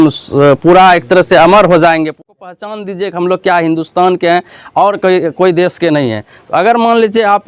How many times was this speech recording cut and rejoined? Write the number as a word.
one